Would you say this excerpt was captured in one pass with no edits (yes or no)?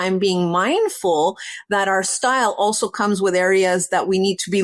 yes